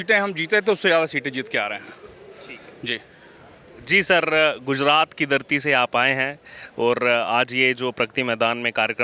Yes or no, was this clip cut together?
no